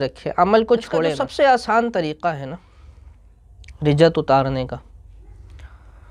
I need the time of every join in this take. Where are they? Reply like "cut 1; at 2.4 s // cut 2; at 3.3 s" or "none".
cut 1; at 1.2 s